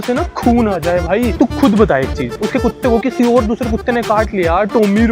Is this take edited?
no; 0 cuts

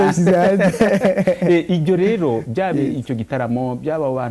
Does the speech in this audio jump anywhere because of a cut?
no; 0 cuts

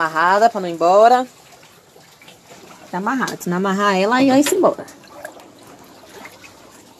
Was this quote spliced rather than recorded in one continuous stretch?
no; 0 cuts

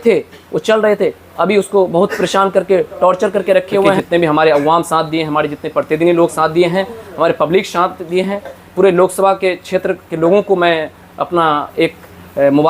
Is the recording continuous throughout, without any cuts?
no; 1 cut; at 4.0 s

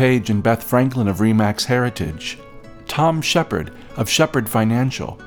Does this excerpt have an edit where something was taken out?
no; 0 cuts

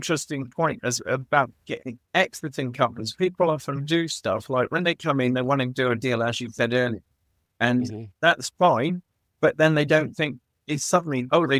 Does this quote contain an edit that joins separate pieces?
no; 0 cuts

